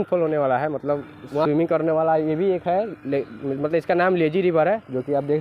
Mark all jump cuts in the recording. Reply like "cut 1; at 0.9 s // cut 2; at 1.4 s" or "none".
cut 1; at 1.4 s